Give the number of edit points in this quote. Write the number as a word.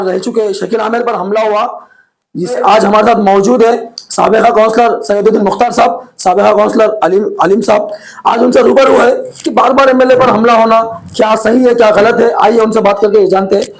one